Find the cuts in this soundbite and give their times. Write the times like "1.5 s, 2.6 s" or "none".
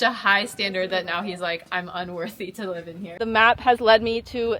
3.2 s